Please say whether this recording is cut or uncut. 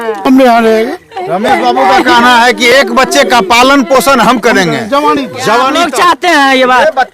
cut